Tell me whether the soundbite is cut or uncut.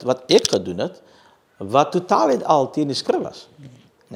uncut